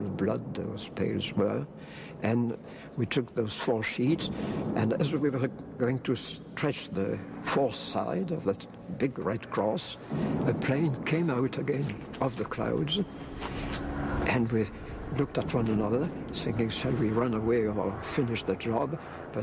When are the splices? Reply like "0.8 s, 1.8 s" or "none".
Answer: 2.7 s